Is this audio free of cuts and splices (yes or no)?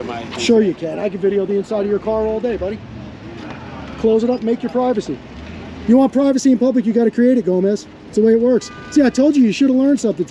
yes